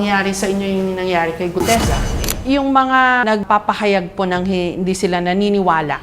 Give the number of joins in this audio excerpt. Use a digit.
2